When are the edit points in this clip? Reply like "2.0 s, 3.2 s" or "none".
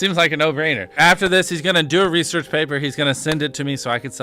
0.9 s